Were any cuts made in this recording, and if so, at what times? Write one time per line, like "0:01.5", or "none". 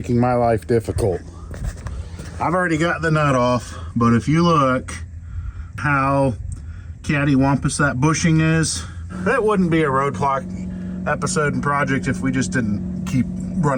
0:05.8
0:09.1